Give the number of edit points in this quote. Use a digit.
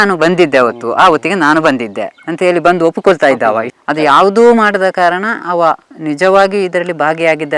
1